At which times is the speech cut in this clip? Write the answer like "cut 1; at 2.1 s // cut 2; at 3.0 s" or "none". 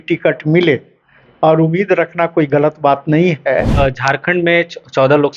cut 1; at 3.7 s